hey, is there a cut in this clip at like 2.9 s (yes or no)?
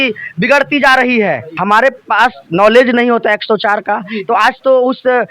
no